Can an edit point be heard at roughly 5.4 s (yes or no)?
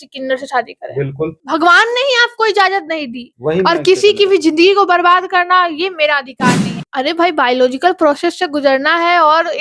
no